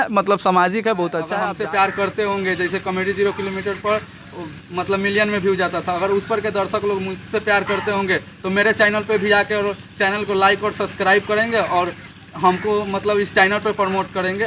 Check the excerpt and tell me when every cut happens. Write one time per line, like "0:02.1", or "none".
0:01.3